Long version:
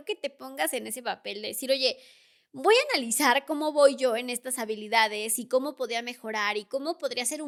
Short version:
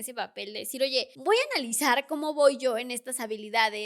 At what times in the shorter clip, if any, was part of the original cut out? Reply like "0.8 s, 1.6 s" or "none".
1.1 s